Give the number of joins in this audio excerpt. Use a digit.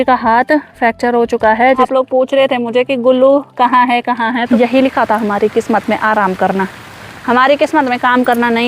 2